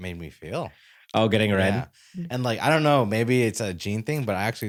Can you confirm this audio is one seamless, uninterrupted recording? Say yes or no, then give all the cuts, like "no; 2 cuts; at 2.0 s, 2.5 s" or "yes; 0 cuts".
yes; 0 cuts